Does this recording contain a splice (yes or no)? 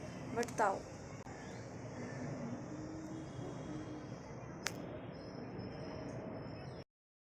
no